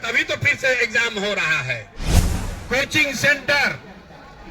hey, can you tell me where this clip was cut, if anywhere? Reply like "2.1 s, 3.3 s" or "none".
2.2 s